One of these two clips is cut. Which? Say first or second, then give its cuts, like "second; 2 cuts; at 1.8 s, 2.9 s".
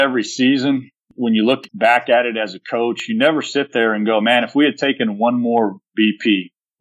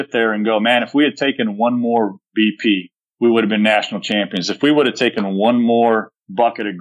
first; 2 cuts; at 1.0 s, 1.7 s